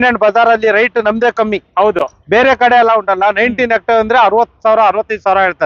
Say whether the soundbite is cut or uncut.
uncut